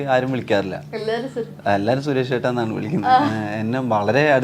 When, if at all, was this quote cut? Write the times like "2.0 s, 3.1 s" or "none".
none